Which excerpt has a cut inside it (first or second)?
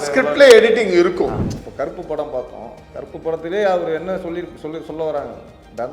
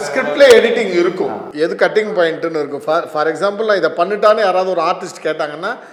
first